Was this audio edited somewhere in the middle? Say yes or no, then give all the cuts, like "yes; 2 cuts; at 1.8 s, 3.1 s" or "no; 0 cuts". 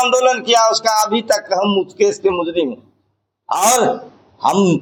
no; 0 cuts